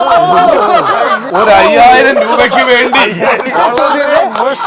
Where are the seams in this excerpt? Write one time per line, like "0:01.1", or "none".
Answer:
0:01.2
0:03.5